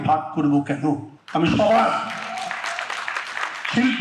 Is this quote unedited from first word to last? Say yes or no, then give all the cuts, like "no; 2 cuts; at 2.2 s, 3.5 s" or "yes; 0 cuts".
no; 1 cut; at 1.1 s